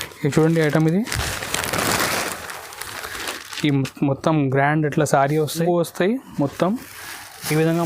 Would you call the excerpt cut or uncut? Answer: cut